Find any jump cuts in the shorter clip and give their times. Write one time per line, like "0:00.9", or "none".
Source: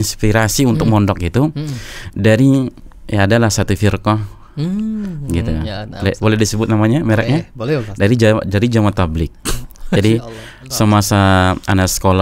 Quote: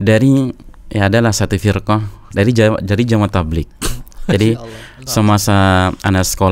0:02.2